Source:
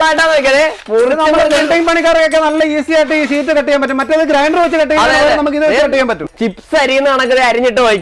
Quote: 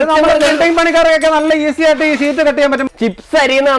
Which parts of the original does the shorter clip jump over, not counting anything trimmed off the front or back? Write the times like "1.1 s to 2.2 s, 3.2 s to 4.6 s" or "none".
4.0 s to 6.3 s